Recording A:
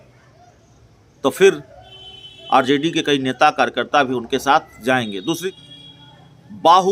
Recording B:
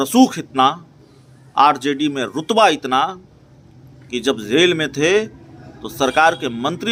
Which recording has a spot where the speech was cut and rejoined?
A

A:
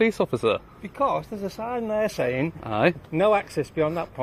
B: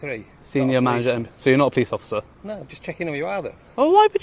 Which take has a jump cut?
A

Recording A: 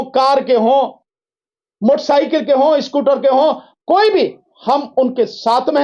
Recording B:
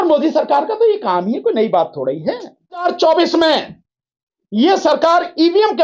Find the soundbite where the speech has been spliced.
B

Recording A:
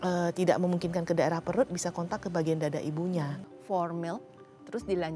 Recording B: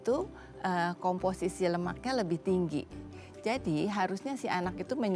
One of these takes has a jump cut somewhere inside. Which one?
A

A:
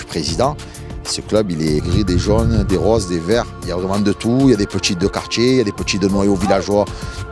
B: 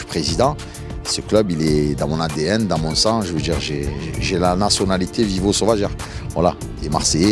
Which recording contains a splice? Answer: B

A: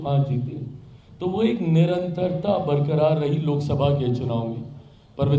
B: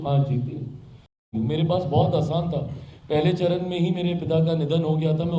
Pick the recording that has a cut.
B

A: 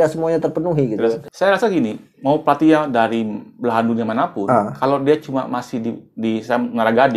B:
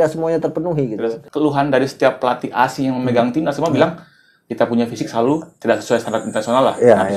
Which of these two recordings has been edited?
B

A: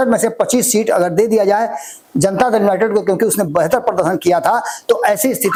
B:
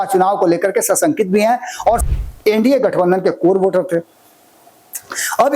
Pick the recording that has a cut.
B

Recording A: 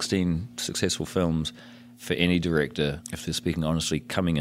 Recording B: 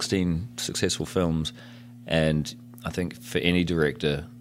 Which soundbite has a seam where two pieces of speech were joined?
A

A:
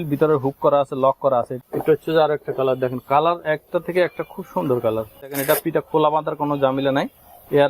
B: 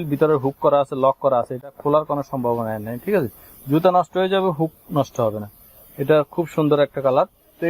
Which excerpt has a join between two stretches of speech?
A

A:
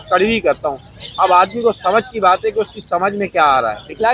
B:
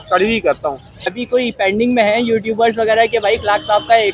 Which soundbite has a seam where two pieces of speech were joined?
B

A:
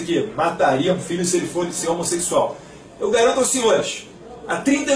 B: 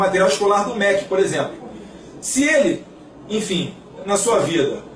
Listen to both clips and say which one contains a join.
B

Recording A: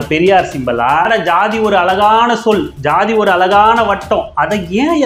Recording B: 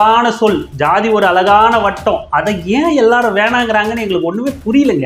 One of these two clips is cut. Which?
A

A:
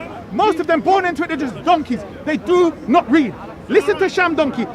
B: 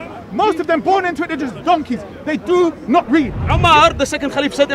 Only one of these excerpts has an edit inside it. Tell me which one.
B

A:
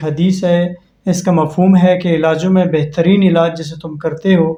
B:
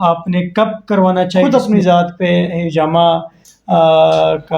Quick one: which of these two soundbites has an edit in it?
B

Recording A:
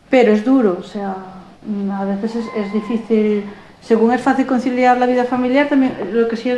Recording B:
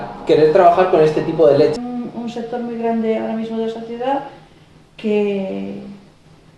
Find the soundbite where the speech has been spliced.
B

